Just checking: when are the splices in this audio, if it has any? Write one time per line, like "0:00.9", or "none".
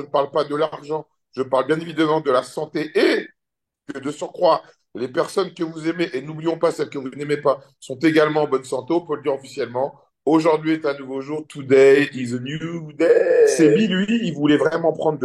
0:13.7